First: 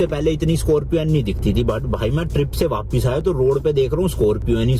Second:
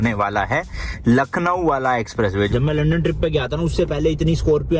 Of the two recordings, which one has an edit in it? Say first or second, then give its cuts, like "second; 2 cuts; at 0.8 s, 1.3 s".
second; 1 cut; at 2.5 s